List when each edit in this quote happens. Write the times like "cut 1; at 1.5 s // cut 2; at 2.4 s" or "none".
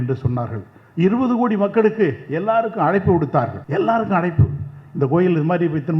cut 1; at 3.6 s